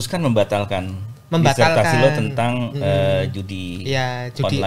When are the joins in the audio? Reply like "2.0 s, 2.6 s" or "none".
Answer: none